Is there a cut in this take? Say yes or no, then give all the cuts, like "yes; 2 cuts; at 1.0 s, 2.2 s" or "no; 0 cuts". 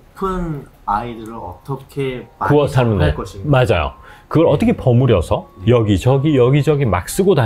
no; 0 cuts